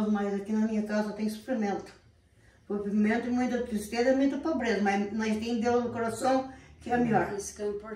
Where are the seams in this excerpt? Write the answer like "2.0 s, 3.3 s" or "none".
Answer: none